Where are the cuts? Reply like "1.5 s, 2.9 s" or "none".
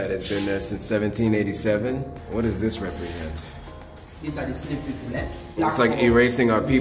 2.2 s, 5.6 s